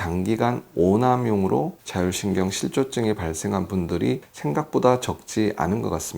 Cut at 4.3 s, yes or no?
yes